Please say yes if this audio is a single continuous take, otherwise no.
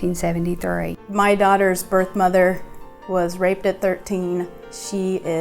no